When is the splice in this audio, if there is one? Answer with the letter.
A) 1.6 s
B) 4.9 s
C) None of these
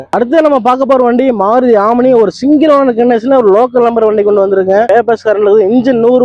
B